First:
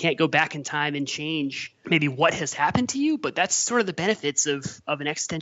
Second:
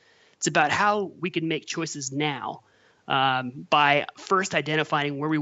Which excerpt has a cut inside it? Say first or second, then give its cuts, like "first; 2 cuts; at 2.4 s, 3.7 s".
first; 1 cut; at 1.7 s